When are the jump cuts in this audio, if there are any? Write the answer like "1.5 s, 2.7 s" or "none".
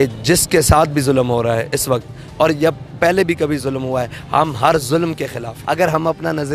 5.5 s